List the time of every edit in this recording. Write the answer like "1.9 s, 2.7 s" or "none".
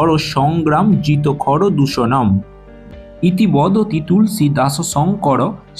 3.0 s